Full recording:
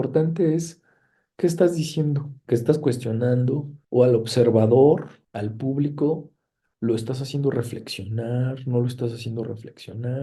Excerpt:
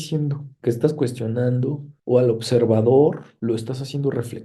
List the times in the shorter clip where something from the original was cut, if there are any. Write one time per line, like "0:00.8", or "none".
0:03.3